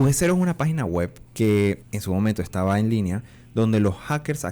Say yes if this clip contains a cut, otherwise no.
yes